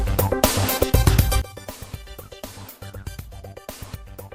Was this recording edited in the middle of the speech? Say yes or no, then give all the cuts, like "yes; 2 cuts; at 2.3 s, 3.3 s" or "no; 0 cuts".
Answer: no; 0 cuts